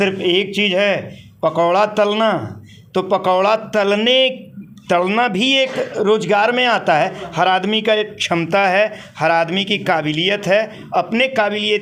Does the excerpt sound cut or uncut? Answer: uncut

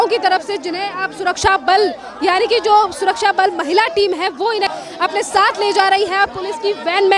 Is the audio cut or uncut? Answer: uncut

